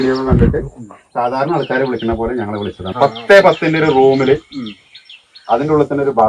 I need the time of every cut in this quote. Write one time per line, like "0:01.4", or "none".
0:02.9